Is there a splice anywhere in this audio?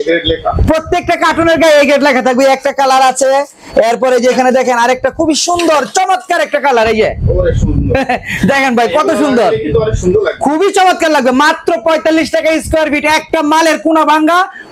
no; 0 cuts

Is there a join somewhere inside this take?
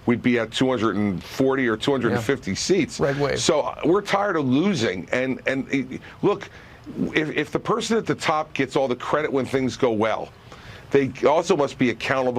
yes; 1 cut; at 3.4 s

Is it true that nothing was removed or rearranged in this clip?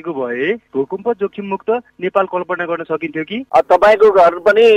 no; 1 cut; at 3.4 s

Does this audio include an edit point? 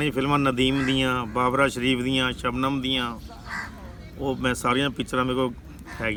no; 0 cuts

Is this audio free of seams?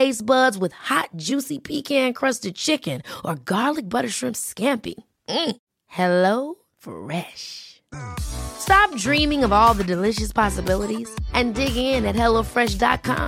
yes; 0 cuts

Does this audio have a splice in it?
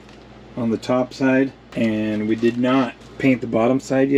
yes; 2 cuts; at 1.6 s, 3.0 s

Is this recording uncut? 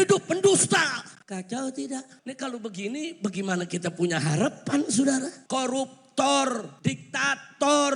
no; 4 cuts; at 1.1 s, 2.2 s, 5.4 s, 6.7 s

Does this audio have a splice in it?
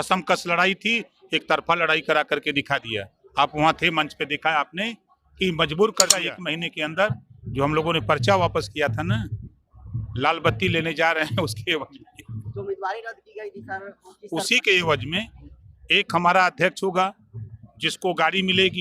yes; 1 cut; at 6.2 s

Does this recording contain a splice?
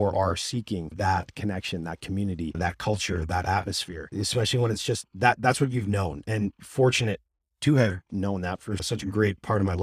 yes; 1 cut; at 8.8 s

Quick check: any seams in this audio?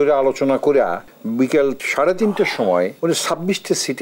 yes; 3 cuts; at 1.1 s, 1.8 s, 2.9 s

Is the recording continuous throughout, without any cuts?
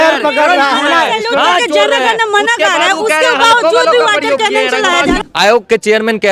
no; 1 cut; at 5.1 s

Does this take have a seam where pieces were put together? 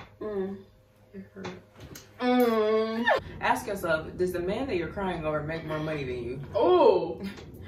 yes; 1 cut; at 3.2 s

